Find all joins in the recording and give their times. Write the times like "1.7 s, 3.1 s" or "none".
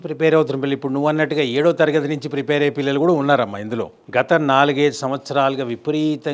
4.0 s

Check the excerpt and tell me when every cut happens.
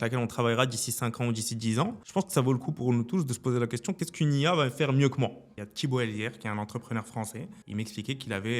2.0 s, 4.0 s, 5.5 s, 7.5 s

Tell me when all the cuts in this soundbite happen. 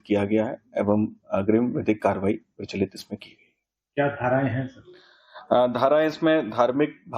4.6 s

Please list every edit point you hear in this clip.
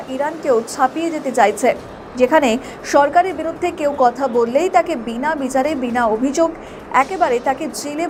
none

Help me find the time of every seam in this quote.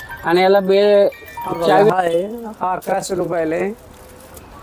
1.9 s

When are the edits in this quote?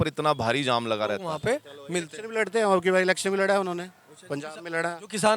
1.3 s

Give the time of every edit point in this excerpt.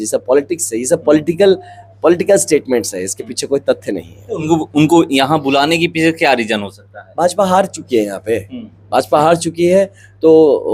none

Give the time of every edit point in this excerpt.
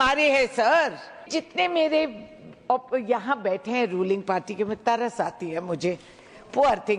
1.3 s

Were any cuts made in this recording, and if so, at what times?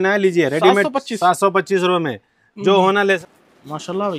3.2 s

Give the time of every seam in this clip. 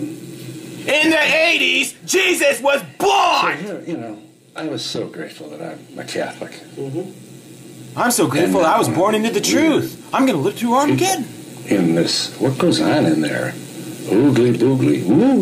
none

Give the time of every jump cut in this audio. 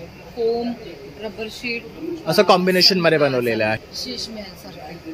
3.8 s

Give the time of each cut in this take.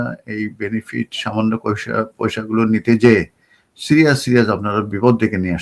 none

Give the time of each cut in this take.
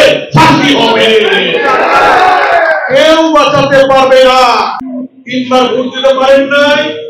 4.8 s

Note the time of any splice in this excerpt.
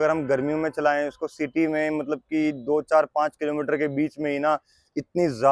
none

